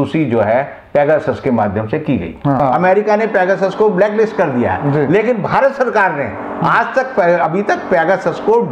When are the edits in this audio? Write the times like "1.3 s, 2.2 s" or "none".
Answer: 2.6 s